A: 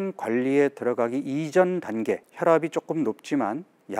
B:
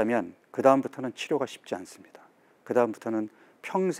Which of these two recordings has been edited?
A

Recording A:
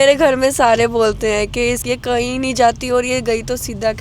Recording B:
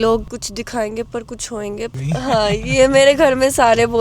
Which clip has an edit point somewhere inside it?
B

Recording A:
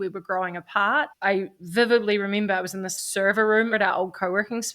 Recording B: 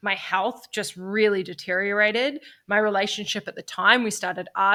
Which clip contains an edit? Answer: A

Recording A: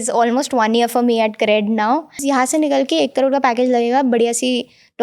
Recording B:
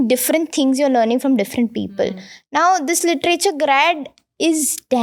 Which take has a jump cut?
A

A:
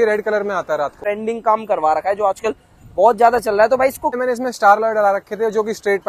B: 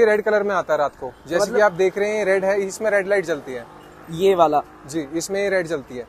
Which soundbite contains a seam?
A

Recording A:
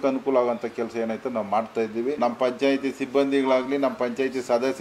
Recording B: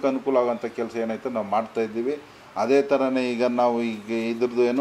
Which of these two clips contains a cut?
A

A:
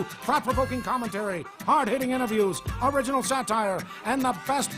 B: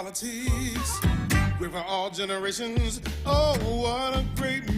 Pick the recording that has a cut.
A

